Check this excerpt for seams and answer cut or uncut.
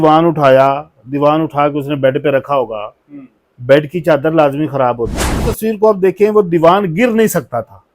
cut